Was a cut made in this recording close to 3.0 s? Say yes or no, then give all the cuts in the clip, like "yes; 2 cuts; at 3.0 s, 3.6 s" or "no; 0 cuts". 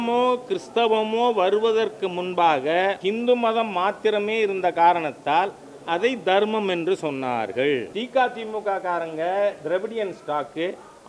yes; 2 cuts; at 3.0 s, 8.0 s